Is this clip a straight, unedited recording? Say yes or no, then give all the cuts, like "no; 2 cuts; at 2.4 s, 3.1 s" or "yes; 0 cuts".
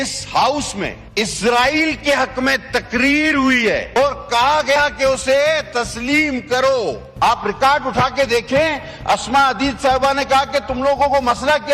no; 3 cuts; at 1.0 s, 4.0 s, 6.6 s